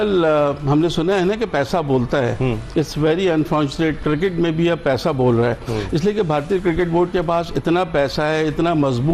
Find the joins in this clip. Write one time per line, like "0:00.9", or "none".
none